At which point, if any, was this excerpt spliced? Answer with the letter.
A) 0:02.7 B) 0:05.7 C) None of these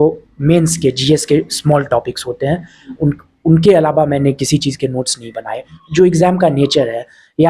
B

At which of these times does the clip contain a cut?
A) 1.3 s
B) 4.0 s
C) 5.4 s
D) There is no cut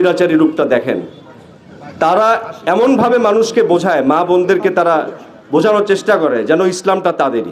D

